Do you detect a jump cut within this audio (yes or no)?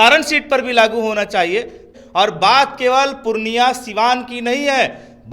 yes